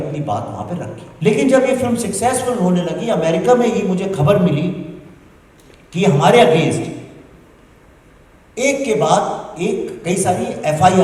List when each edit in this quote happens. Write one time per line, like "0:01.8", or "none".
0:01.0